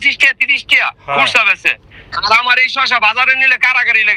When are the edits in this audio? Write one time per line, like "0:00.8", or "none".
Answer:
none